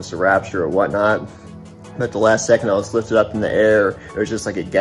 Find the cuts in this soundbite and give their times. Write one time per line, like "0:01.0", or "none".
none